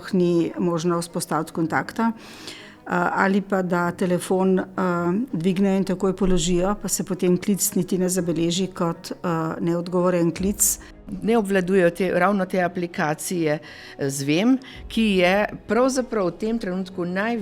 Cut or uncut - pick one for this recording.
cut